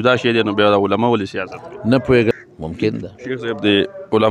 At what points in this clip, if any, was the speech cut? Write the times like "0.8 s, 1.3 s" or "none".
2.3 s